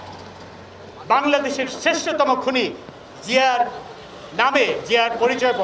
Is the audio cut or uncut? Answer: uncut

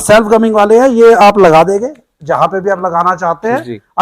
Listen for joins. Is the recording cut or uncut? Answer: uncut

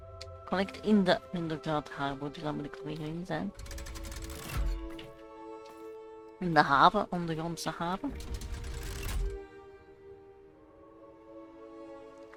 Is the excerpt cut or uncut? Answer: uncut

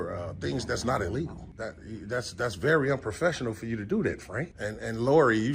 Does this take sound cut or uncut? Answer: cut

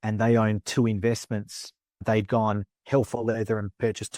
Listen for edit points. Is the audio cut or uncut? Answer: cut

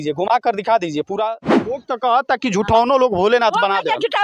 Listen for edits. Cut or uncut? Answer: cut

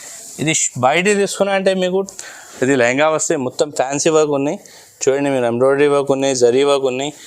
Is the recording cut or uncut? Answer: cut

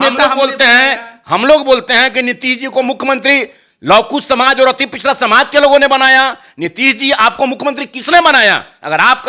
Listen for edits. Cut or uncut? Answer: uncut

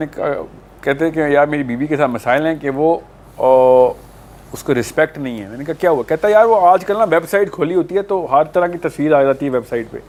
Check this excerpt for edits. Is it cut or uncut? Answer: uncut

